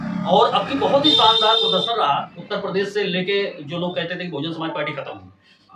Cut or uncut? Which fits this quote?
uncut